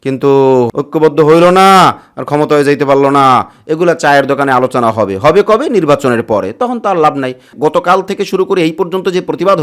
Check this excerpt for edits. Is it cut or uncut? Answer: cut